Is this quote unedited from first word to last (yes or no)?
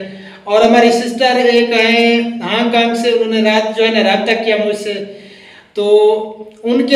yes